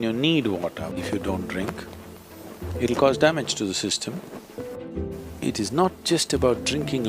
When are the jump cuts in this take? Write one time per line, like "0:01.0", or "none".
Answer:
0:01.0
0:04.8